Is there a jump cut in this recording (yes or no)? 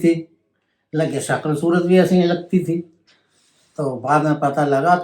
no